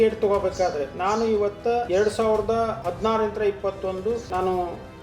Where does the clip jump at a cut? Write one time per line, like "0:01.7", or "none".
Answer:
0:00.9
0:01.9
0:02.8
0:04.2